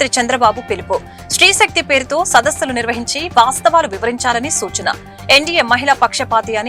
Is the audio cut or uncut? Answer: uncut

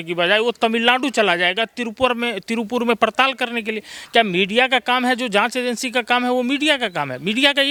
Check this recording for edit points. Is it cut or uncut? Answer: uncut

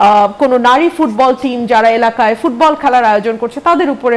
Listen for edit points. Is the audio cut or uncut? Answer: uncut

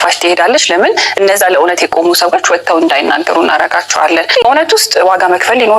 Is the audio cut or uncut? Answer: cut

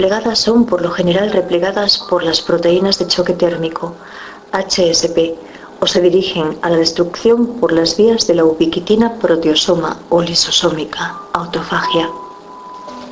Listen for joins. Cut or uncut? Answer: cut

